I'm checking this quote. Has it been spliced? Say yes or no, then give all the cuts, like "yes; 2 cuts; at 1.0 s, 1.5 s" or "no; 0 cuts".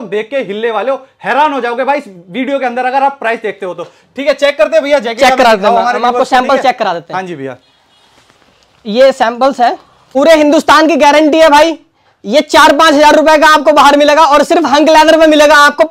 no; 0 cuts